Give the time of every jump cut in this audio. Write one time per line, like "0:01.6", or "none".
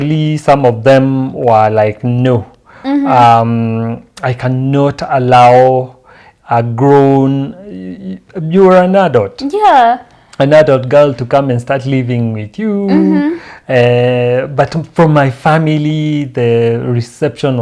none